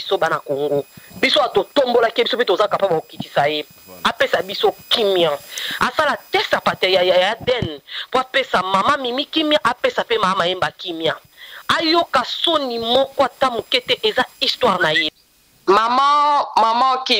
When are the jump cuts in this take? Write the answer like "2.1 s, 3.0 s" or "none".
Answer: 15.1 s